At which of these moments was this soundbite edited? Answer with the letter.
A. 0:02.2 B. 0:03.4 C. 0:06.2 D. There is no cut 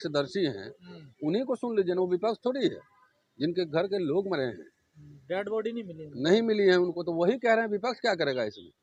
D